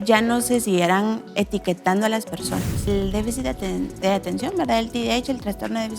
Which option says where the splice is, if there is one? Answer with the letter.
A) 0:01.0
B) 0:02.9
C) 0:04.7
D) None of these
B